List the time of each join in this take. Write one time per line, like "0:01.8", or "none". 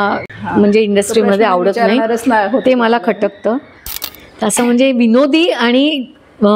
0:04.0